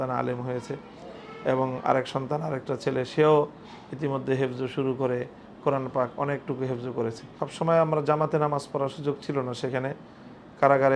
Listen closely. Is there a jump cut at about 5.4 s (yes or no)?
no